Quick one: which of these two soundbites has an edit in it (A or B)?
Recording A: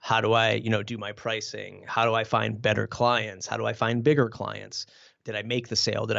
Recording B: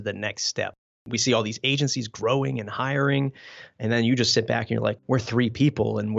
B